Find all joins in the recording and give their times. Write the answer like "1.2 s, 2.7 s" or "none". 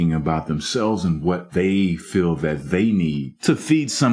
1.4 s, 3.3 s

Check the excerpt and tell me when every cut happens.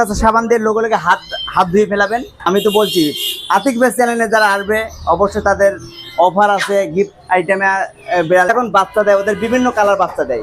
2.3 s, 8.5 s

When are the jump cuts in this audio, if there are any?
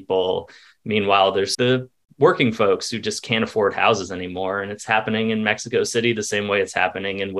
1.5 s

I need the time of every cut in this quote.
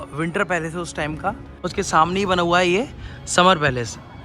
1.5 s

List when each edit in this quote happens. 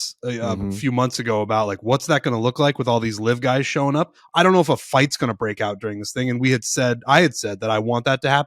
4.2 s

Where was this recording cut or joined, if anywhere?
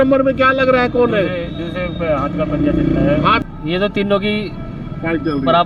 3.4 s

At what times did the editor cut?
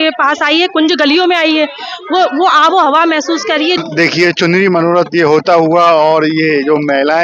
3.8 s

